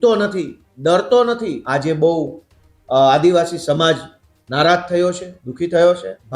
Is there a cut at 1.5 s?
yes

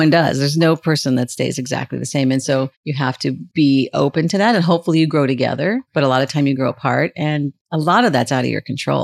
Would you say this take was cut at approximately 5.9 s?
yes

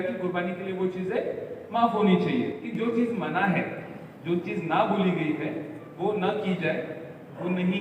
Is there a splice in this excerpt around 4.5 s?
no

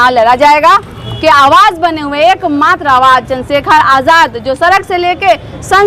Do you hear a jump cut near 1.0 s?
yes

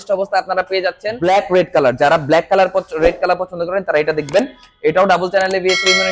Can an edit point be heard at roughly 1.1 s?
yes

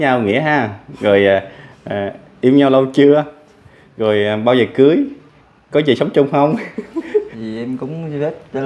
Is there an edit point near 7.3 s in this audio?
yes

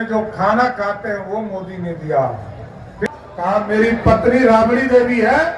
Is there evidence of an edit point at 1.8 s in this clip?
no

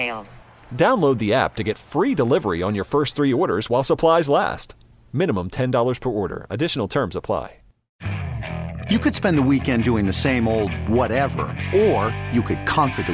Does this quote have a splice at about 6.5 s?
no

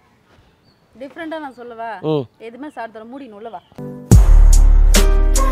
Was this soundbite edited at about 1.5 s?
no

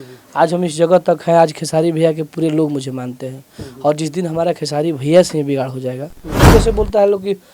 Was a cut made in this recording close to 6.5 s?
yes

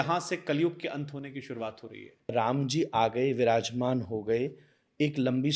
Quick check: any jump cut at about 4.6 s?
no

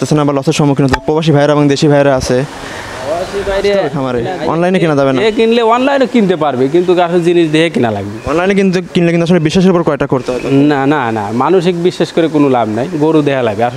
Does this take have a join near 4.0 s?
yes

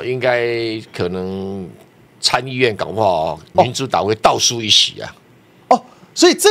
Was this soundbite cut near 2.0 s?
no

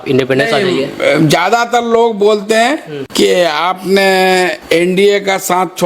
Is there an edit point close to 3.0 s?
yes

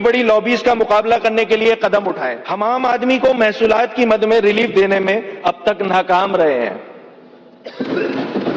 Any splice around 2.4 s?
yes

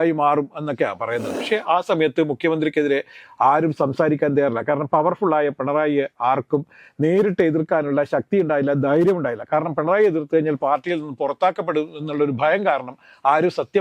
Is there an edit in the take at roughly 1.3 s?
yes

